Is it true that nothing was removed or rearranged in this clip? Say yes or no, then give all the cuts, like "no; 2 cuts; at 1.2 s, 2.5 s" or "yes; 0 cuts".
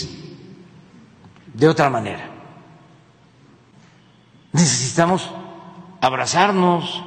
no; 1 cut; at 3.7 s